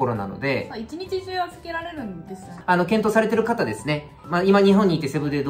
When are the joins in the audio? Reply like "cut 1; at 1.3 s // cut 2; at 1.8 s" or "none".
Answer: cut 1; at 2.5 s // cut 2; at 4.1 s